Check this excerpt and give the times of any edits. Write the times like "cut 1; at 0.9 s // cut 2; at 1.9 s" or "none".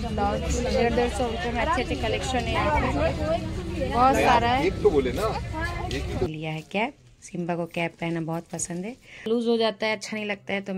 cut 1; at 6.3 s // cut 2; at 9.3 s

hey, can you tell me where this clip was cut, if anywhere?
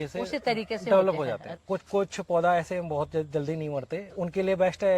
cut 1; at 1.5 s

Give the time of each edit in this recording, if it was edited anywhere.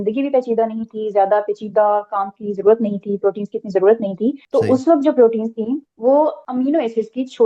cut 1; at 4.4 s // cut 2; at 5.9 s // cut 3; at 6.4 s

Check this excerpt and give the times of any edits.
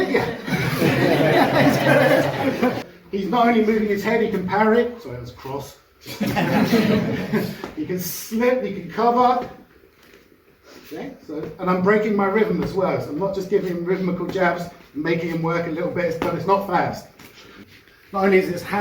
cut 1; at 2.8 s // cut 2; at 17.6 s

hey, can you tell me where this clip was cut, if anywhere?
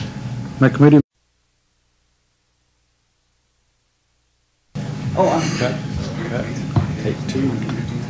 none

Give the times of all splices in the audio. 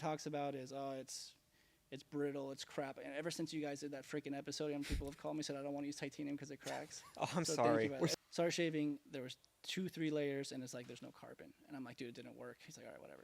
cut 1; at 8.1 s

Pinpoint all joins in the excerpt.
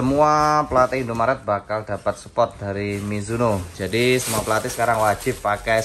none

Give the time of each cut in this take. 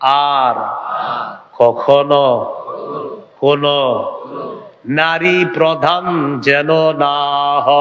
none

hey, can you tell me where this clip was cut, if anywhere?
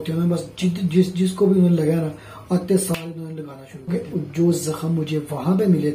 cut 1; at 3.9 s

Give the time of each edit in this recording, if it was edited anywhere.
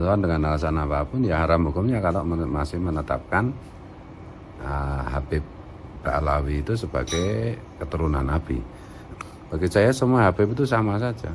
cut 1; at 9.1 s

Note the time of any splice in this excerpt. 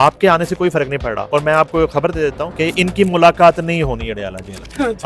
cut 1; at 1.2 s // cut 2; at 2.5 s

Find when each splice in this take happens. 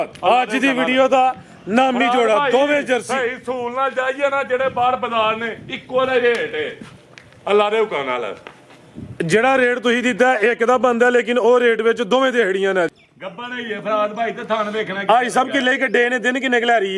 cut 1; at 13.0 s

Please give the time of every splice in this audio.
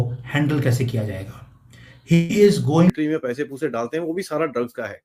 cut 1; at 2.9 s

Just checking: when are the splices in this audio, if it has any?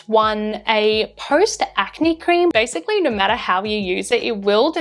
cut 1; at 2.5 s

